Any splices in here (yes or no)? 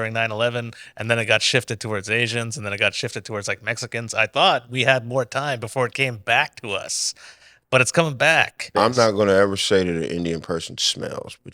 yes